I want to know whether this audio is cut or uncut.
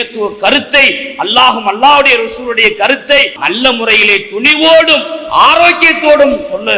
cut